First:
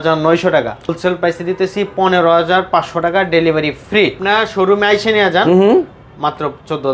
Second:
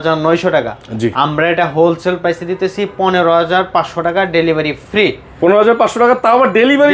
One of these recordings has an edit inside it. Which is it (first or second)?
first